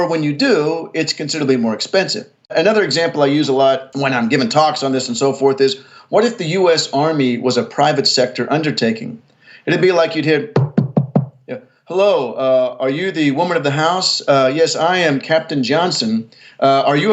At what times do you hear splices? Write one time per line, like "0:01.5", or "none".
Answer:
0:02.5
0:03.9